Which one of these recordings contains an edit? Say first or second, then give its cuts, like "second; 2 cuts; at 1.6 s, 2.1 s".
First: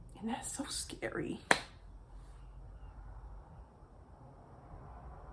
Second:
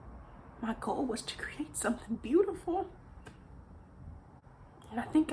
second; 1 cut; at 4.4 s